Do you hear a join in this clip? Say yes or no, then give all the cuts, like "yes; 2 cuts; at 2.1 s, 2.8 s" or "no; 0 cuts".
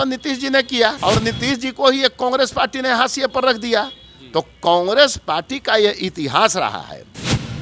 yes; 1 cut; at 1.0 s